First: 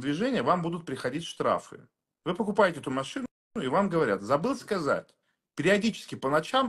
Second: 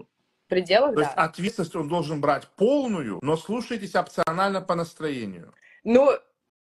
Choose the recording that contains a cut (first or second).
second